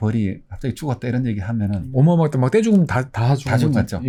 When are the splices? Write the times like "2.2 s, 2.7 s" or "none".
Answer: none